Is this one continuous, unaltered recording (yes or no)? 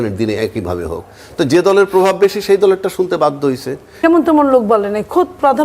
no